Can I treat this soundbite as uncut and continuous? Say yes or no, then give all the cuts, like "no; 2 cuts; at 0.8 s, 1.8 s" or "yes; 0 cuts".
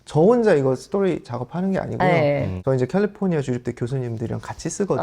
no; 1 cut; at 2.6 s